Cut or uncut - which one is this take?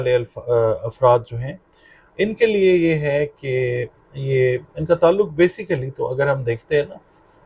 uncut